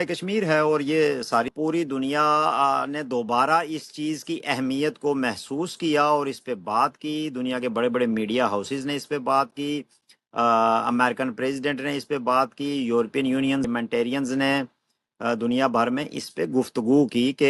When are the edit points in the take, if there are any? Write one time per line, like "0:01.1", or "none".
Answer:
0:01.5
0:13.7